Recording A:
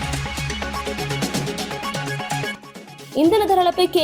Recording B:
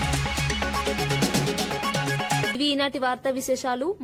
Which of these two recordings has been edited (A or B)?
A